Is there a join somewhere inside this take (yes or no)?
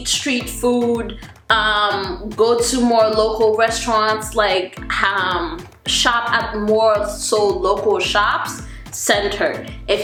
no